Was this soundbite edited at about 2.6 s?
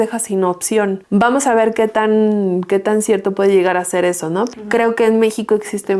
no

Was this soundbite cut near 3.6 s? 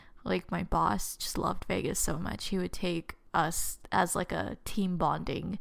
yes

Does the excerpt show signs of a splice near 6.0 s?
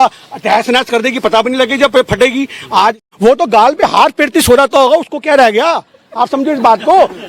no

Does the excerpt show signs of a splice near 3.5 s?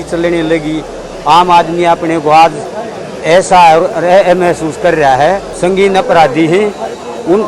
no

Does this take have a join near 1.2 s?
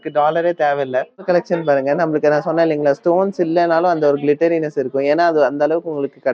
yes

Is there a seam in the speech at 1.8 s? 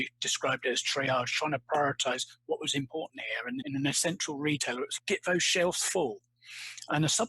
no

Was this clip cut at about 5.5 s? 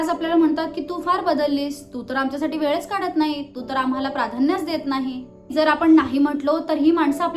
yes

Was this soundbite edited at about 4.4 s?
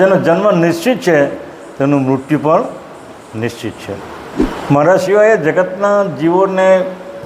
yes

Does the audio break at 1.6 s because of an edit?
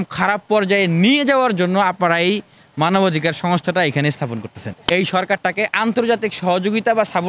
no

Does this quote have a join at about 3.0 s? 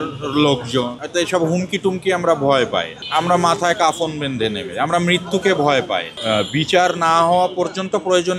yes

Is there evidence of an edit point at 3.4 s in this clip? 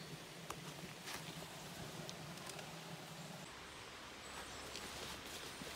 yes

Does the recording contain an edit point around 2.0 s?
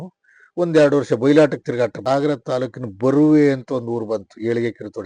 yes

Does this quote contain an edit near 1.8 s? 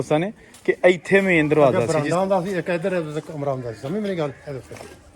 yes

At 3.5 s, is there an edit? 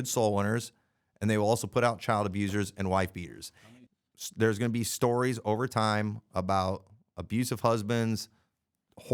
yes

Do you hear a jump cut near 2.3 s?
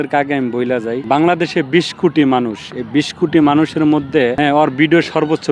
no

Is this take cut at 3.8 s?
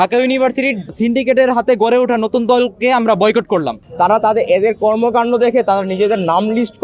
yes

